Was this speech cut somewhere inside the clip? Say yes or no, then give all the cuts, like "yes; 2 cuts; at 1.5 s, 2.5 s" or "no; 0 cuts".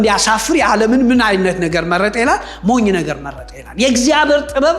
no; 0 cuts